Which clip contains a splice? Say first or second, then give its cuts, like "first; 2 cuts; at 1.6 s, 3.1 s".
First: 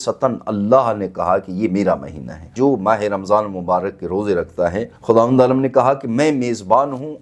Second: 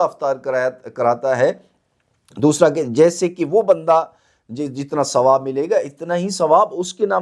first; 2 cuts; at 2.5 s, 4.9 s